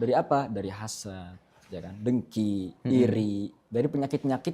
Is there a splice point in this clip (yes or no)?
yes